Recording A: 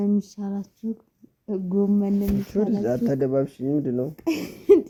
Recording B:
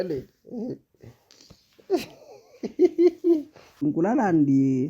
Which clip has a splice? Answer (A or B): B